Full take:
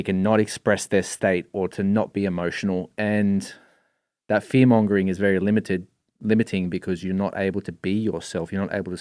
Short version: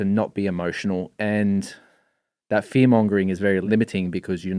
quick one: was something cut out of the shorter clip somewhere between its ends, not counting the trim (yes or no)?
yes